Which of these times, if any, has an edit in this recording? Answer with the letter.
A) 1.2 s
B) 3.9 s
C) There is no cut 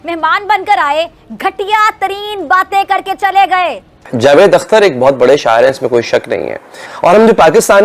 B